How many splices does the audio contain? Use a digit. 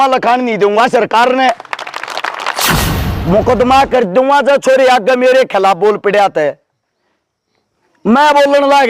1